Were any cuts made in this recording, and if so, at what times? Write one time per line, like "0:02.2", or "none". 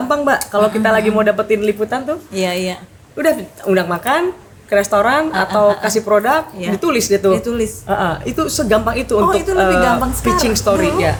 none